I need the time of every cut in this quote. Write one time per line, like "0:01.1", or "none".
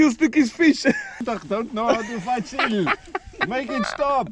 0:01.2